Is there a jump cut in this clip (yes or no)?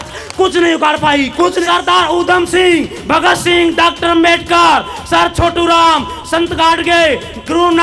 yes